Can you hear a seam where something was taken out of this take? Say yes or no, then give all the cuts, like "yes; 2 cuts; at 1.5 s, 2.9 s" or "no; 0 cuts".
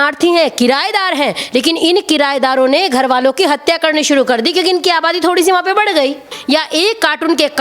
yes; 1 cut; at 6.3 s